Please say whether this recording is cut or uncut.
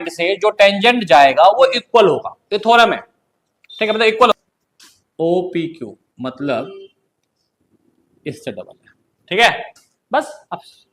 cut